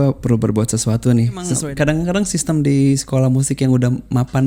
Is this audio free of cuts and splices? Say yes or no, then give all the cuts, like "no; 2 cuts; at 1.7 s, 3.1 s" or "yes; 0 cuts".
no; 1 cut; at 1.5 s